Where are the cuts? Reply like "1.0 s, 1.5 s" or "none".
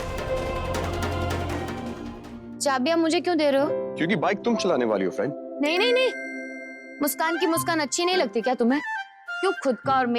2.3 s